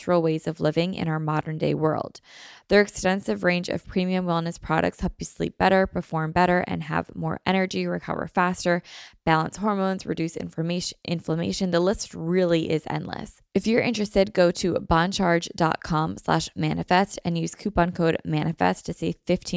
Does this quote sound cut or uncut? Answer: cut